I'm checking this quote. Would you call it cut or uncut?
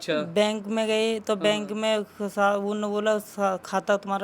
uncut